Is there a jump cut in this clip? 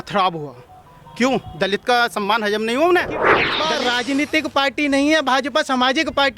yes; 1 cut; at 3.5 s

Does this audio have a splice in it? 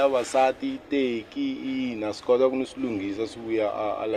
no; 0 cuts

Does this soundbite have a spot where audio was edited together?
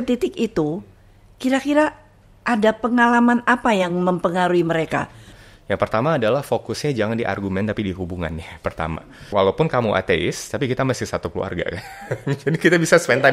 yes; 2 cuts; at 5.3 s, 9.2 s

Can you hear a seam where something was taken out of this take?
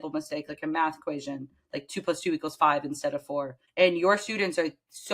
yes; 1 cut; at 3.6 s

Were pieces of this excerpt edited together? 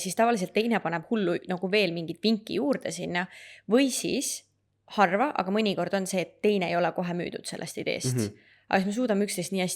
no; 0 cuts

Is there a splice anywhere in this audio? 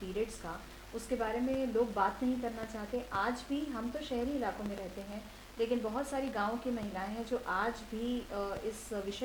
no; 0 cuts

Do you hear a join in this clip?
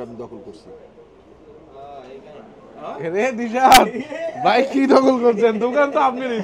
no; 0 cuts

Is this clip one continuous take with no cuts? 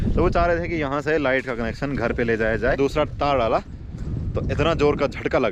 no; 1 cut; at 2.8 s

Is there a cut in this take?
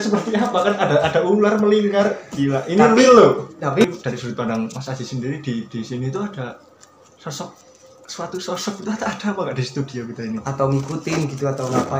yes; 1 cut; at 3.8 s

